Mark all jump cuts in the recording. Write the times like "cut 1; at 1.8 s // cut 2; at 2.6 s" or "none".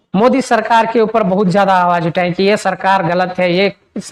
none